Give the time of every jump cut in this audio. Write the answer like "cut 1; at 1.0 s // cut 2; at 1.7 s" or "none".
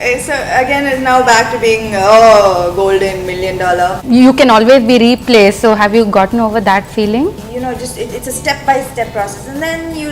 cut 1; at 4.0 s // cut 2; at 7.4 s